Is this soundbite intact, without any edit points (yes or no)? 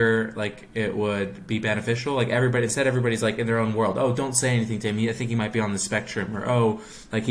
yes